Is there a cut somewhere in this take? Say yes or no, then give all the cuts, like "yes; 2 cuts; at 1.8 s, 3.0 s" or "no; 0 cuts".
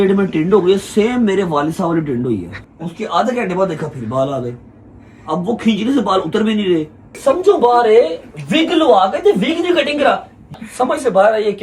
yes; 3 cuts; at 2.6 s, 7.0 s, 10.5 s